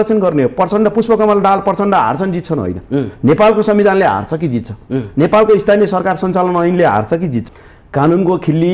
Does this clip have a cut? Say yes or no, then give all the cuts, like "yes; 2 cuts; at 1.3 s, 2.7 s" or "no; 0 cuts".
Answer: yes; 1 cut; at 7.5 s